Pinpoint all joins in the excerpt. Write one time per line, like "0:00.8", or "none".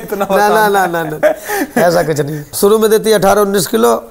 0:02.4